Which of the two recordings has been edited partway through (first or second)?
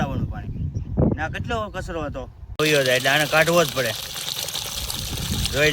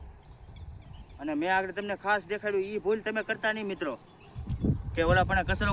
first